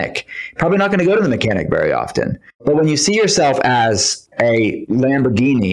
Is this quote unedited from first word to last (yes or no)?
no